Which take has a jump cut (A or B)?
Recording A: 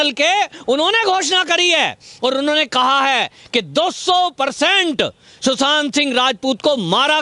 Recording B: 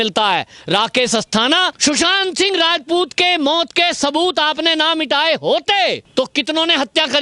B